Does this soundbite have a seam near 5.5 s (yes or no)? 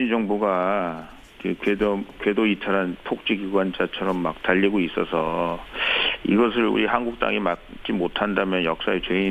no